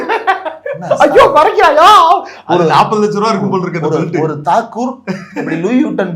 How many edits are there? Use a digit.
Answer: 0